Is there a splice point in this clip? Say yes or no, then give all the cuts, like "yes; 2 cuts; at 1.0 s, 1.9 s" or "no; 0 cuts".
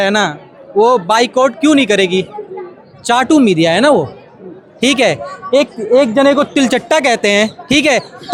no; 0 cuts